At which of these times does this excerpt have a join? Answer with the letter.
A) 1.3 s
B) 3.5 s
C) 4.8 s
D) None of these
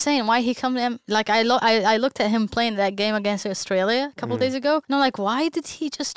C